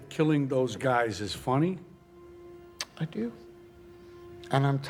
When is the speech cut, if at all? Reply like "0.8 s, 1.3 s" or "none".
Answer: none